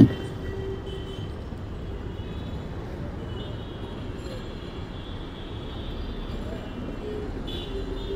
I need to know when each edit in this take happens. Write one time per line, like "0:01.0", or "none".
none